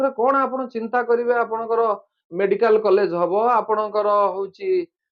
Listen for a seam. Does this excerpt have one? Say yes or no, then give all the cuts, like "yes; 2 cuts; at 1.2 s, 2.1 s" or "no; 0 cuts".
no; 0 cuts